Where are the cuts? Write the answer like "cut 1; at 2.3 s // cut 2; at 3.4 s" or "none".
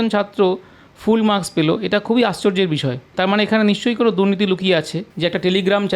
cut 1; at 3.1 s // cut 2; at 5.0 s